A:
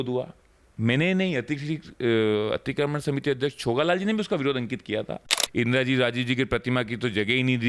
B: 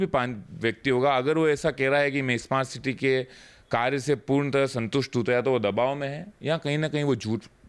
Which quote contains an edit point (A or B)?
A